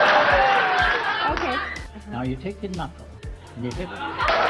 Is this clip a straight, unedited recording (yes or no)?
no